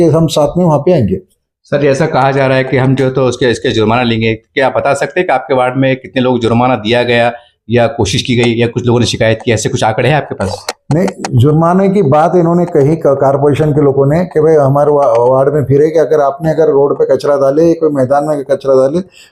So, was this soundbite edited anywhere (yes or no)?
no